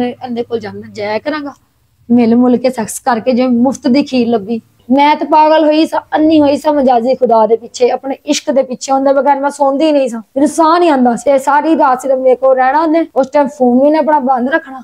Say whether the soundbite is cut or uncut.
uncut